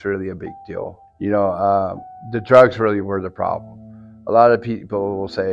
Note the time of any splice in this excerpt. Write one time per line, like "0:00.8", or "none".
0:01.0